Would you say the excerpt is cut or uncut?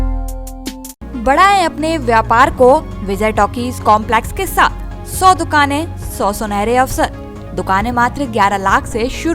uncut